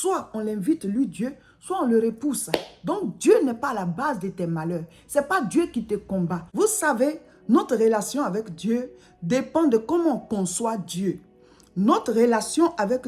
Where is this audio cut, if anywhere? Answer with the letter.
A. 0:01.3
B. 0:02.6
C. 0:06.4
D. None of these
C